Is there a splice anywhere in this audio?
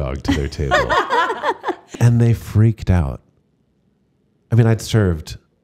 yes; 1 cut; at 1.9 s

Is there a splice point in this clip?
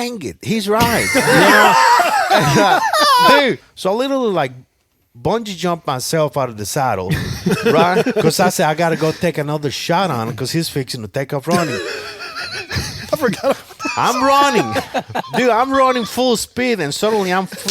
yes; 1 cut; at 3.7 s

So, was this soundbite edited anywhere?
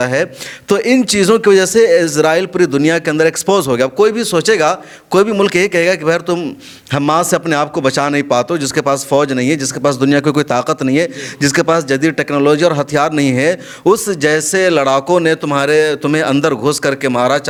no; 0 cuts

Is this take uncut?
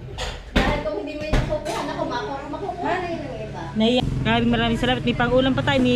no; 1 cut; at 4.0 s

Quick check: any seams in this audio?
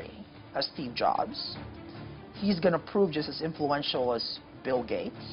no; 0 cuts

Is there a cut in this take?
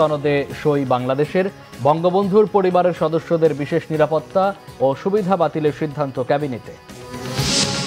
no; 0 cuts

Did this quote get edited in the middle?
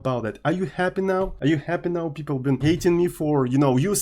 yes; 2 cuts; at 1.3 s, 2.6 s

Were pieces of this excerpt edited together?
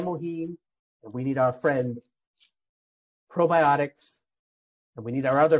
no; 0 cuts

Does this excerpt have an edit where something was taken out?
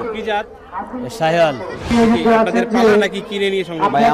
yes; 1 cut; at 1.9 s

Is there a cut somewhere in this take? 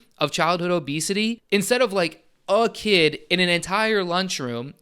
yes; 1 cut; at 1.4 s

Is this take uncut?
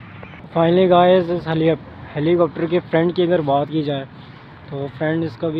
yes; 0 cuts

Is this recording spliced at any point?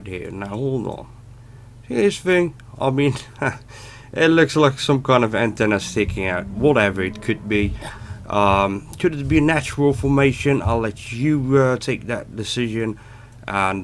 yes; 1 cut; at 3.1 s

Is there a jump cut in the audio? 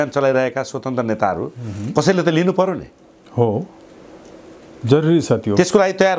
no; 0 cuts

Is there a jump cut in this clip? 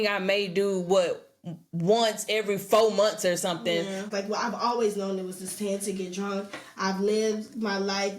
yes; 1 cut; at 4.0 s

